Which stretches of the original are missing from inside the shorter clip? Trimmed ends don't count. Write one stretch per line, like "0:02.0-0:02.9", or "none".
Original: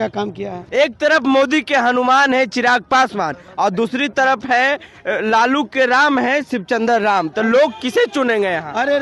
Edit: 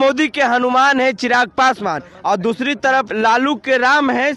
0:04.4-0:05.2

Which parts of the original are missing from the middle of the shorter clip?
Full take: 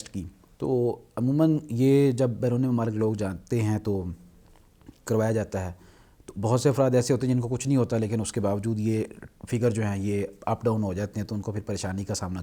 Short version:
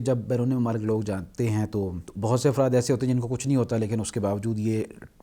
0:04.2-0:06.2

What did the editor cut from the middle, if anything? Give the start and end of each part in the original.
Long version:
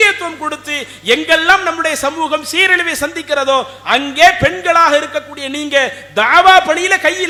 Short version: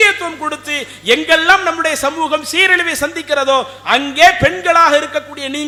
none

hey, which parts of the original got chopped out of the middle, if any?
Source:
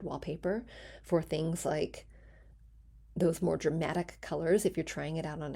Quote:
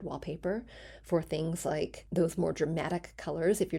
0:02.0-0:03.0

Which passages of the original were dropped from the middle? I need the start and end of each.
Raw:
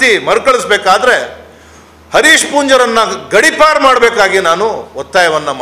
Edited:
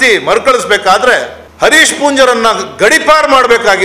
0:01.4-0:01.9

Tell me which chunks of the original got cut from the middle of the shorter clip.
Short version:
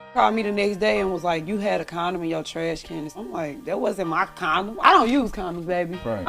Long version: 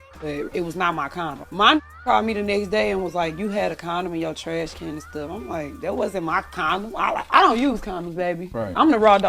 0:05.1-0:05.3
0:06.9-0:07.3

